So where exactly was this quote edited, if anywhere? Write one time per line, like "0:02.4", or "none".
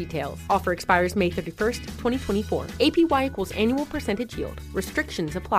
none